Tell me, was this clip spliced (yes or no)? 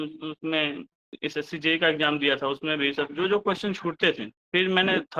yes